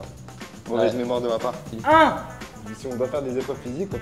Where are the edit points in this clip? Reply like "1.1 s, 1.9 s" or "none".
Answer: 1.7 s